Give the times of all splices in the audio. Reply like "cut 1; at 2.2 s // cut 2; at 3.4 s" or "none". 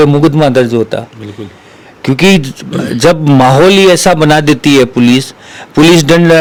none